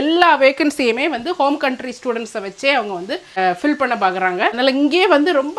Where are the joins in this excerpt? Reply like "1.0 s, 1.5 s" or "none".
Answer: 4.6 s

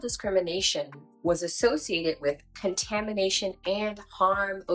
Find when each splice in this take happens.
none

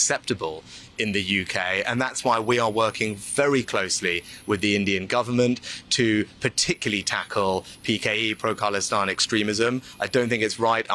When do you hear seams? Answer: none

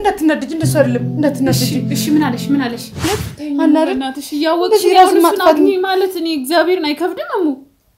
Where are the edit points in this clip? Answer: 3.0 s

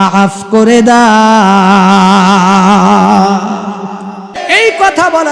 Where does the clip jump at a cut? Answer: 4.4 s

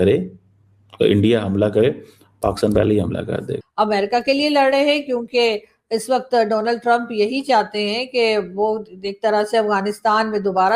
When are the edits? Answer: 3.6 s

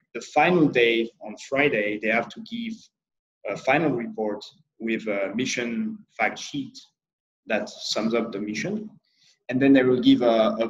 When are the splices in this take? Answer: none

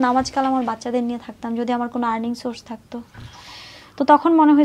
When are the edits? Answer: none

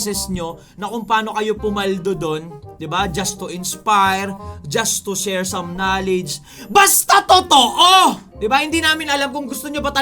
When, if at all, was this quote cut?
8.3 s

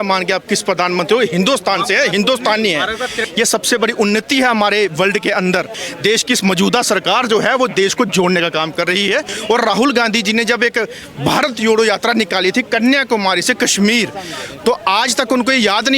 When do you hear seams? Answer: 3.2 s, 5.8 s, 9.3 s

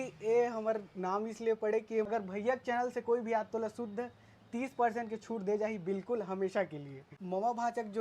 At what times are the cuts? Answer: 2.1 s, 7.1 s

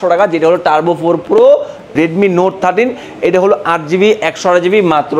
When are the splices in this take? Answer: 1.9 s

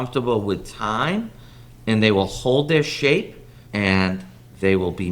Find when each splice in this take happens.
none

